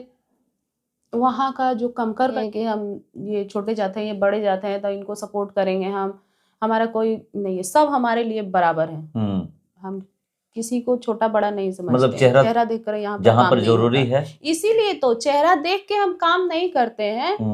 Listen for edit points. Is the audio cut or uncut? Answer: cut